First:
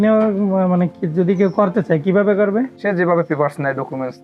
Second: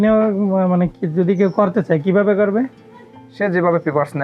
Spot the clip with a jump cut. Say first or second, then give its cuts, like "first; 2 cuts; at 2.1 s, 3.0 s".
first; 1 cut; at 2.8 s